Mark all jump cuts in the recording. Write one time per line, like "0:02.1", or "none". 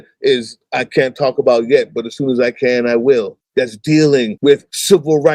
0:03.4
0:04.4